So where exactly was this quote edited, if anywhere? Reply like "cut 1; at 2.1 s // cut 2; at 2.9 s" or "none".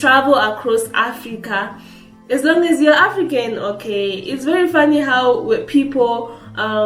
none

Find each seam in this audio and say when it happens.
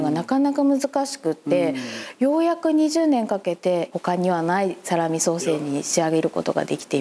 cut 1; at 3.9 s

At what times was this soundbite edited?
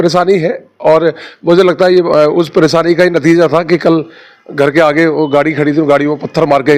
none

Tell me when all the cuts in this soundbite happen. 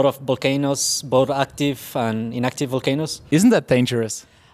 cut 1; at 3.1 s

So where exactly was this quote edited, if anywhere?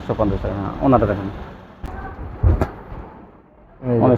cut 1; at 2.2 s

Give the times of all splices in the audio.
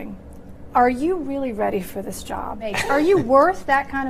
cut 1; at 2.8 s

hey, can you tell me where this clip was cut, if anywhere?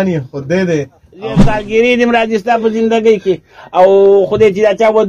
cut 1; at 1.5 s

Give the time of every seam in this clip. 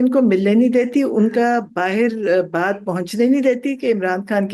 none

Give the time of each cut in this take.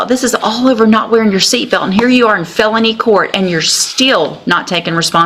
none

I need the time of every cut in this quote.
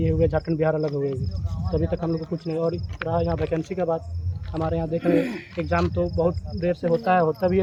none

